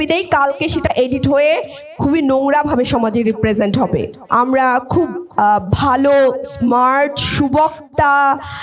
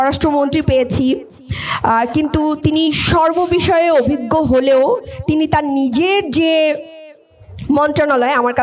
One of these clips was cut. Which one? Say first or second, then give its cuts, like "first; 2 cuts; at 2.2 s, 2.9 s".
first; 1 cut; at 4.2 s